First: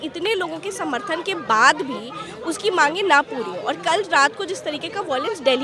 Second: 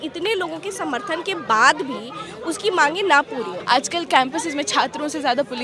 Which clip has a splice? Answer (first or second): second